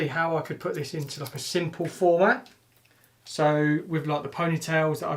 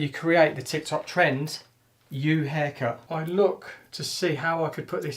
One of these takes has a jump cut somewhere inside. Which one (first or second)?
second